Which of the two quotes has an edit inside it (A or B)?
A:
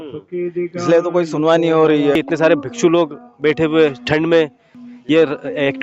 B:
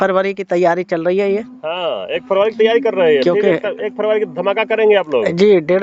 A